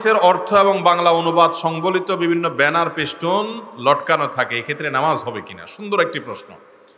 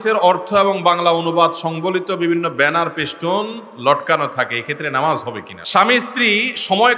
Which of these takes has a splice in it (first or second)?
second